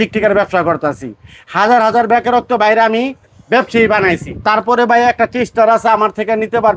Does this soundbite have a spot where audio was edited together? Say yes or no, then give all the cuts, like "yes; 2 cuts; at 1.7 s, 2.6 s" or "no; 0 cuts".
yes; 1 cut; at 4.3 s